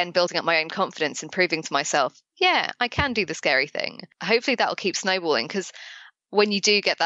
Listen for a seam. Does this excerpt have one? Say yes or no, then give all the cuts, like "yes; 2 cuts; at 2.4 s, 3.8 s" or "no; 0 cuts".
yes; 1 cut; at 4.1 s